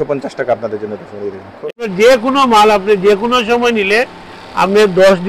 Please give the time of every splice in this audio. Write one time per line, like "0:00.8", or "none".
0:01.8